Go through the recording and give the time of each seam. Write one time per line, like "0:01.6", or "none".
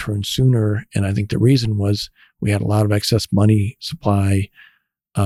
none